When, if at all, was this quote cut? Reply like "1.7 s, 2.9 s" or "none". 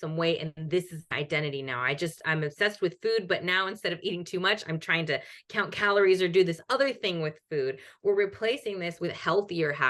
none